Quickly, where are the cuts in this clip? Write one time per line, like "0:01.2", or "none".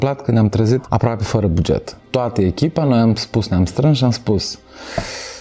0:00.8
0:02.0